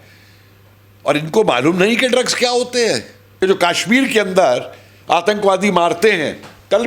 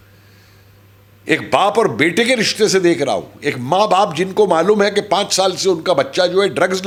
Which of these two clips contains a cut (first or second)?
first